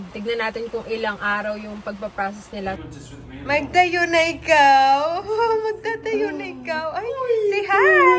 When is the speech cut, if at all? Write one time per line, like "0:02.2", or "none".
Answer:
0:02.8